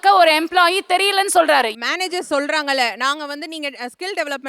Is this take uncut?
no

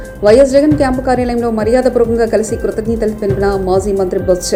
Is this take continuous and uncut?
yes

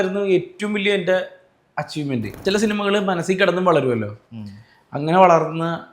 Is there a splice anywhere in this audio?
yes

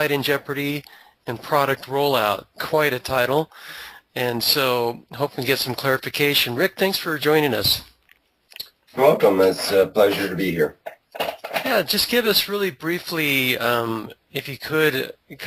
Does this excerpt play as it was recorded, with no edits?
no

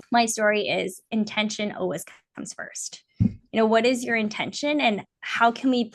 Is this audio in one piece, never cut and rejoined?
yes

